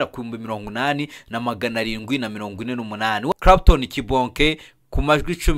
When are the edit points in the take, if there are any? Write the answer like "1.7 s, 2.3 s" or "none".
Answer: 3.3 s